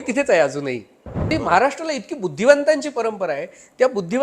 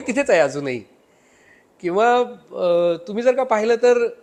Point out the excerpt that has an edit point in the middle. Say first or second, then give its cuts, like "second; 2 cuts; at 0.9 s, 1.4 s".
first; 1 cut; at 1.3 s